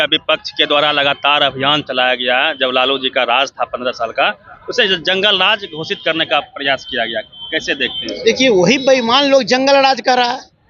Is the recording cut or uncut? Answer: uncut